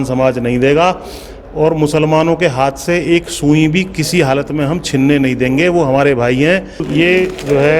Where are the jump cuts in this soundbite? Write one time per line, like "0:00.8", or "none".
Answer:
0:06.8